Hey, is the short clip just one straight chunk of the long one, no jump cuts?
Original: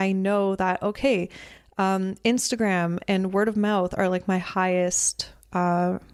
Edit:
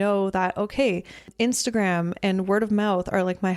no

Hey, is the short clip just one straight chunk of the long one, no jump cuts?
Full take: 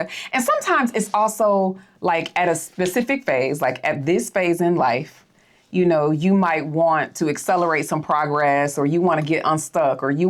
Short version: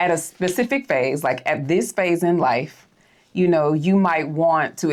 yes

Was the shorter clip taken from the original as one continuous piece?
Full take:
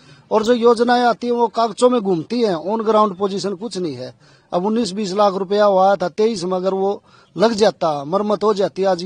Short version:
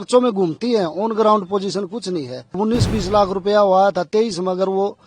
no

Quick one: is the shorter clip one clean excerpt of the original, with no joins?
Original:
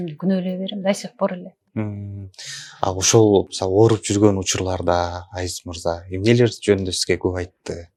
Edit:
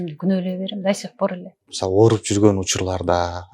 no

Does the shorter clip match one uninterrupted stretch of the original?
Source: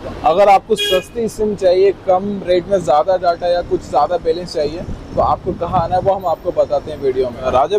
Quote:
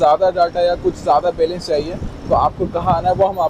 yes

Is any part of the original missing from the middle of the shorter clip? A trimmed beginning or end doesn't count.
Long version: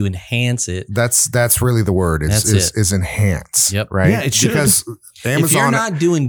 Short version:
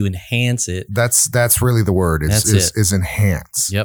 no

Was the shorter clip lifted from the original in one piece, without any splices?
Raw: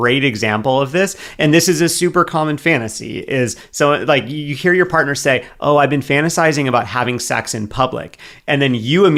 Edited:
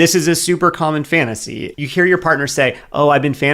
no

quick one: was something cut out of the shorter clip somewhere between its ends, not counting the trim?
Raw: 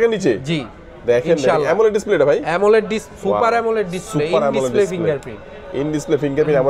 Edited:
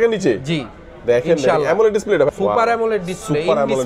yes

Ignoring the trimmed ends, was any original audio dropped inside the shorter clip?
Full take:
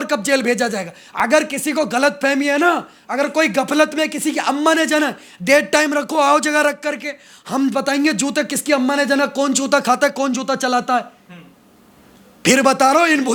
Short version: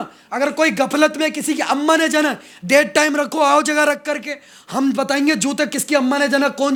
no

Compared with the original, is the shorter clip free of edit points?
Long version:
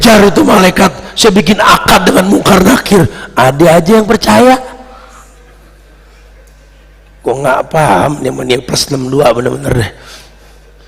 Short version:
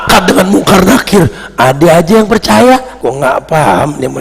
no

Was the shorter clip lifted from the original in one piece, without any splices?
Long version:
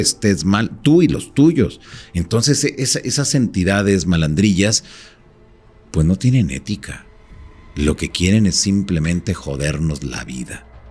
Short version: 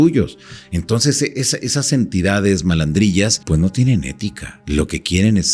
no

